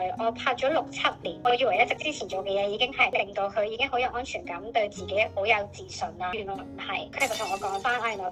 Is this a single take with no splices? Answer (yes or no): yes